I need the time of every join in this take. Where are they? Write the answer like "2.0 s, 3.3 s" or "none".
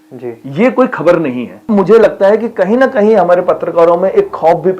1.7 s